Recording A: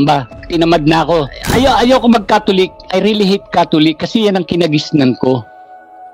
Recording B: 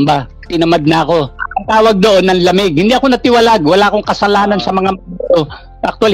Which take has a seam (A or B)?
A